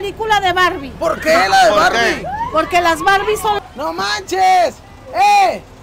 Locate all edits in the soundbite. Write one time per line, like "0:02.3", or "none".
0:03.6

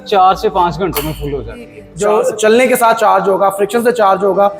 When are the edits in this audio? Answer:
0:01.8

